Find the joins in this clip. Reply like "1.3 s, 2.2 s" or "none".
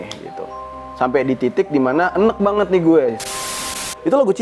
3.4 s